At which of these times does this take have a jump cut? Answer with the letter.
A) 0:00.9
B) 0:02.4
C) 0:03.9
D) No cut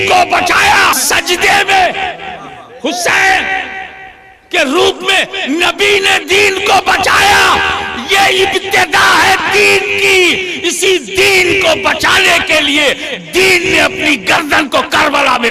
A